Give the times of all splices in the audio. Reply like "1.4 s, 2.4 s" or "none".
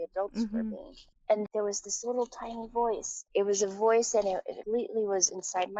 1.4 s, 3.1 s, 4.5 s